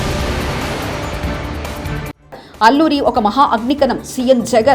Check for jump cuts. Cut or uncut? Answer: cut